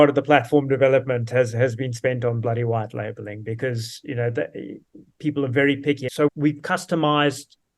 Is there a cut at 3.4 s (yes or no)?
no